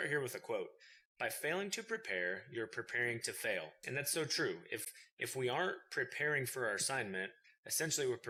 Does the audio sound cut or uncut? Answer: uncut